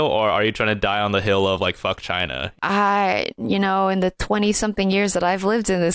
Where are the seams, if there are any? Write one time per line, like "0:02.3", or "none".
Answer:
0:02.5

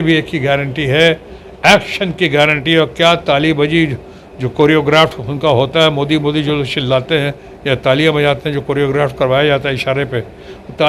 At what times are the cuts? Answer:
none

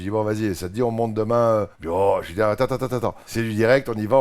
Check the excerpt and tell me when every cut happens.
0:01.8
0:03.2

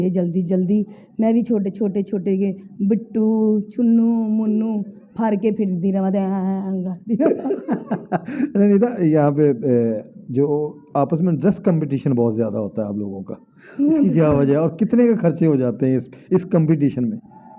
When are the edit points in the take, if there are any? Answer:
none

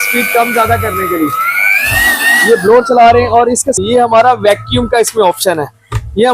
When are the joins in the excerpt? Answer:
0:03.7

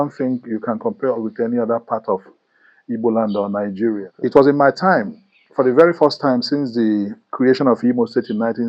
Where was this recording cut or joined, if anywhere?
0:04.1

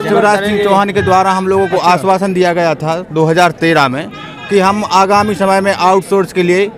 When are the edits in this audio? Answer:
none

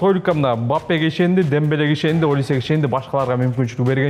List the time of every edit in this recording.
none

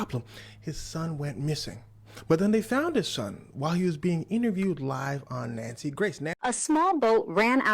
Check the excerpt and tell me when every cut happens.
0:06.3

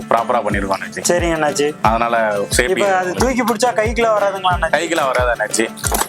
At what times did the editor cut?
none

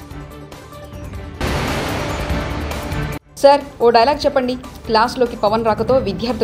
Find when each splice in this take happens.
0:01.4

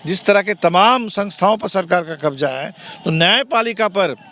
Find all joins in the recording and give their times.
none

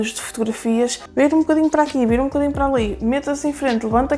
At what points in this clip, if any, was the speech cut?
0:01.0

